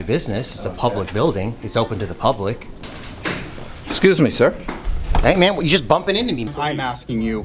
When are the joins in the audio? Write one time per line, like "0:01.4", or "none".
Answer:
0:02.9
0:06.5

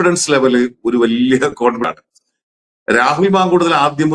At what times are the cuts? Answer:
none

